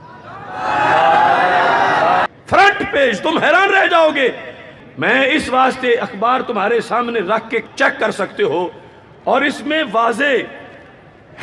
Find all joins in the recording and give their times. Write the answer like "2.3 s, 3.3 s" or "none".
2.3 s